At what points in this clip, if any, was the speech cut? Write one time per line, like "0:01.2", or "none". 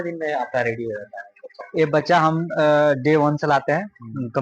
none